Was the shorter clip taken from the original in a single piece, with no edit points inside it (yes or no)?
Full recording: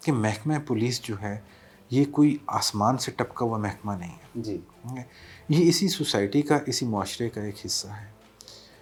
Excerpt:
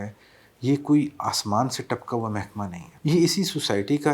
no